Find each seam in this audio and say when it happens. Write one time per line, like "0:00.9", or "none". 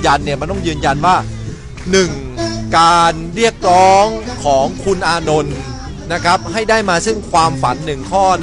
none